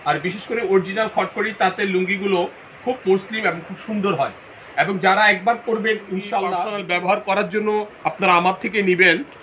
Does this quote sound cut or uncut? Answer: cut